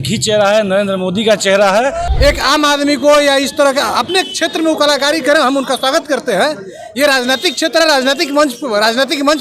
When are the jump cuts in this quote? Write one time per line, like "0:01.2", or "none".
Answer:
0:02.0